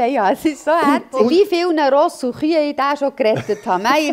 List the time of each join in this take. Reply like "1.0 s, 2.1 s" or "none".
1.3 s